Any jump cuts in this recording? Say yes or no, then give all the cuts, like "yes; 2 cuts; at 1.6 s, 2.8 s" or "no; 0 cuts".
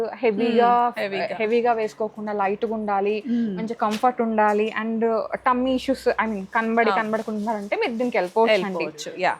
no; 0 cuts